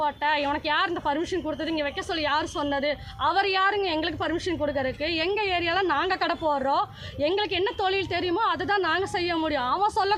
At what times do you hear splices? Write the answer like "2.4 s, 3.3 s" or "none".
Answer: none